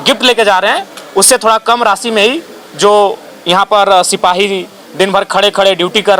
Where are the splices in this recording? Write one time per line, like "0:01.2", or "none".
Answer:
none